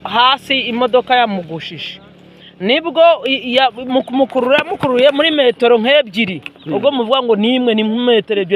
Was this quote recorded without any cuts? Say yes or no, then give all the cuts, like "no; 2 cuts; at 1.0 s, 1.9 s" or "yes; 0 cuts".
yes; 0 cuts